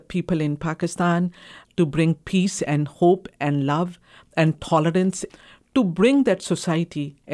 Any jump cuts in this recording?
yes; 2 cuts; at 1.6 s, 5.2 s

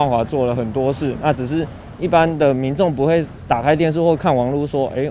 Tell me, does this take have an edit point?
no; 0 cuts

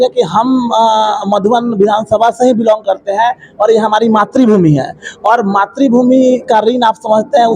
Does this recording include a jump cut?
no; 0 cuts

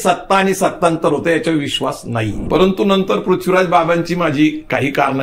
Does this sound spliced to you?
yes; 1 cut; at 2.4 s

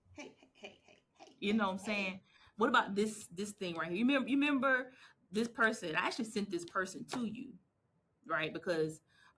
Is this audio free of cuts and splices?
yes; 0 cuts

